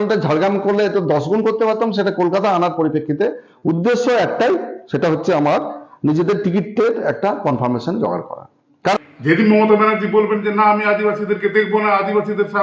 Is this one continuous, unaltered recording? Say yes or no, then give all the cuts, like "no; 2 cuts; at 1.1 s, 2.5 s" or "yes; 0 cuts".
no; 1 cut; at 9.1 s